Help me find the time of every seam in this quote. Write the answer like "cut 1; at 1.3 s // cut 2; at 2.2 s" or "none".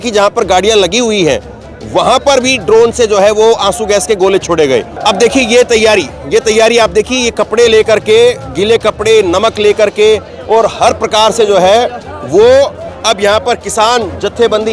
cut 1; at 4.9 s